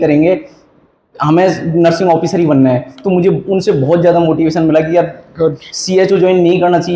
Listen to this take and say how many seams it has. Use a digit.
0